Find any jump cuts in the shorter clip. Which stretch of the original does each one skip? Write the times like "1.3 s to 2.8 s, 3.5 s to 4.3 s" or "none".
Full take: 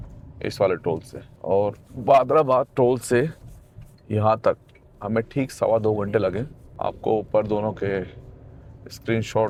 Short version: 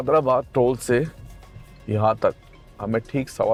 none